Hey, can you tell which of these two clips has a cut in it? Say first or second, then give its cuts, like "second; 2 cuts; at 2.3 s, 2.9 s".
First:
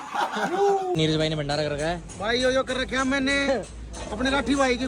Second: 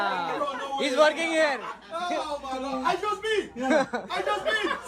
first; 1 cut; at 1.0 s